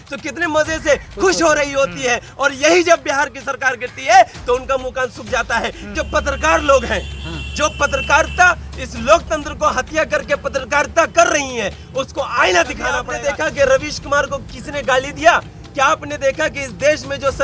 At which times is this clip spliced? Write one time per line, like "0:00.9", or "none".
0:05.8
0:13.1